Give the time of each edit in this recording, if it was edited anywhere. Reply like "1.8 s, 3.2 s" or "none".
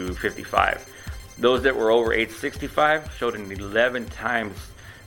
none